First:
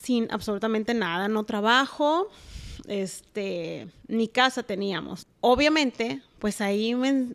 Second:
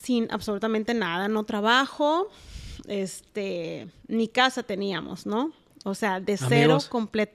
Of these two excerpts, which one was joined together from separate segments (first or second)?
first